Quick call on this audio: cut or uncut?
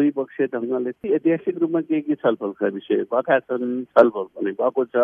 cut